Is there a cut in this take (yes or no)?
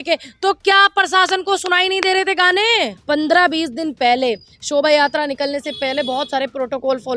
yes